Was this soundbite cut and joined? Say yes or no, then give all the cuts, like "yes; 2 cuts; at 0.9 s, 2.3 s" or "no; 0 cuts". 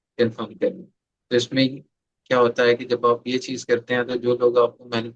no; 0 cuts